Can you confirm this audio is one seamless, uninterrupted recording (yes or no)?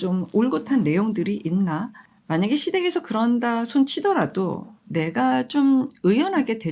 yes